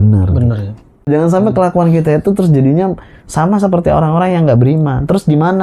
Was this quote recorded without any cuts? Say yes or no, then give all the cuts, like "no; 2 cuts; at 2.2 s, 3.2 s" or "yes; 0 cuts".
no; 1 cut; at 1.1 s